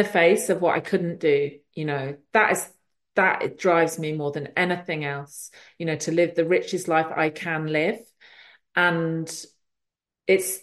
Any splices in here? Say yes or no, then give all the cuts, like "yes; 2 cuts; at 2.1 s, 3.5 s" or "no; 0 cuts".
no; 0 cuts